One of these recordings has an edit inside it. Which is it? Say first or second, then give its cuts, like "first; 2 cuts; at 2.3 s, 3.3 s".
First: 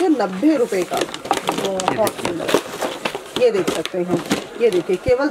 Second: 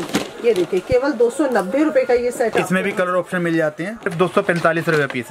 second; 1 cut; at 4.1 s